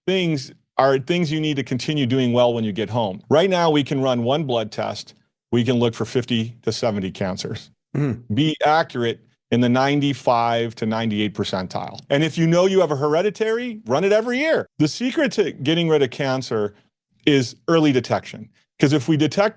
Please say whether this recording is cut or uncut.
cut